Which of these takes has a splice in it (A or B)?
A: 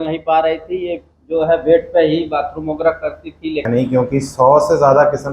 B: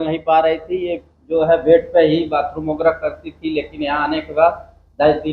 A